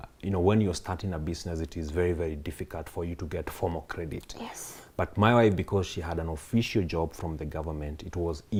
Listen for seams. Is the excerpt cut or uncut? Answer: uncut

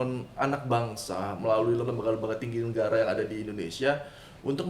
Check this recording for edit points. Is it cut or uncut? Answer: cut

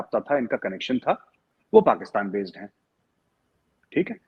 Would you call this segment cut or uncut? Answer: uncut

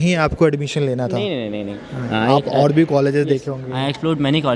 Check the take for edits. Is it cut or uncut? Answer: uncut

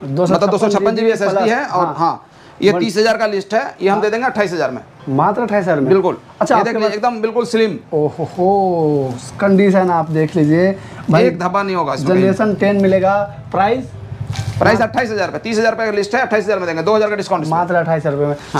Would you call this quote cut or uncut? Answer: uncut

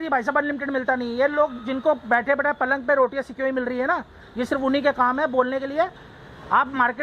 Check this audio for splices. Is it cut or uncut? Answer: uncut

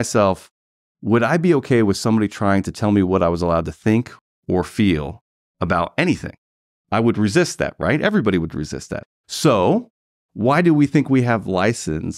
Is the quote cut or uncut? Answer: cut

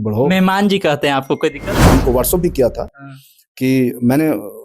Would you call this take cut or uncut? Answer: cut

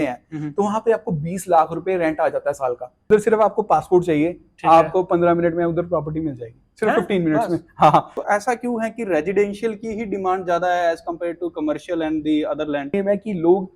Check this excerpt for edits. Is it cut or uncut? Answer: cut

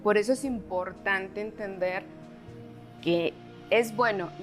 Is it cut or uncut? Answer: uncut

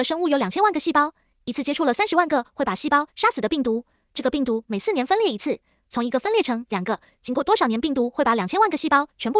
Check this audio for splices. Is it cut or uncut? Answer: uncut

